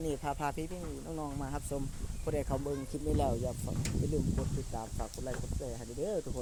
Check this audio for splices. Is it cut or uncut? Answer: uncut